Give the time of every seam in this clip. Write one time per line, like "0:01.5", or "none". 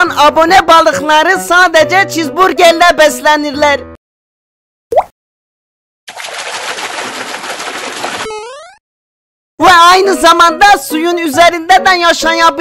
0:08.3